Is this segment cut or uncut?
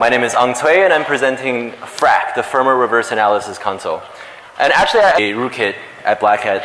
uncut